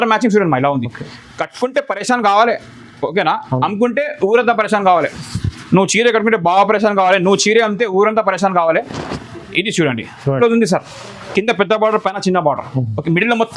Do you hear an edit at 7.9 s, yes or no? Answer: no